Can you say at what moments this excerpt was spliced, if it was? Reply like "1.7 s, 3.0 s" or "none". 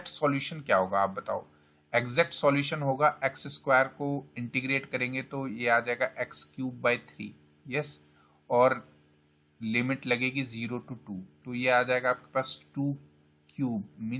none